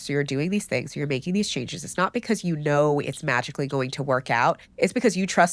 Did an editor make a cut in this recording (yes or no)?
no